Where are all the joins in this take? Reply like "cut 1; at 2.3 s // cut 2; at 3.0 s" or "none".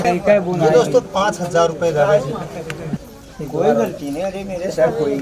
cut 1; at 3.0 s